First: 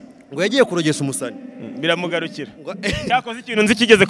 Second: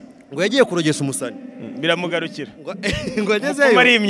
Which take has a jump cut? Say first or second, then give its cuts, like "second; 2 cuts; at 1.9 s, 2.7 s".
first; 1 cut; at 3.0 s